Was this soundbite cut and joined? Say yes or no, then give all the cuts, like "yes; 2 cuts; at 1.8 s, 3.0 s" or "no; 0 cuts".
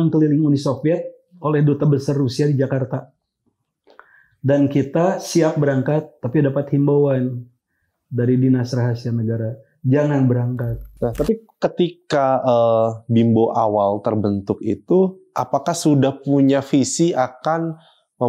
yes; 1 cut; at 10.9 s